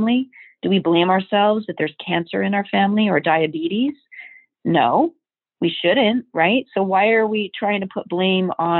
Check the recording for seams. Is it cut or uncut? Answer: uncut